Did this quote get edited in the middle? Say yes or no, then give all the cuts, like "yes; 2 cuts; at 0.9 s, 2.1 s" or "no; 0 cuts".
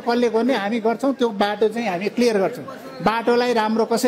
no; 0 cuts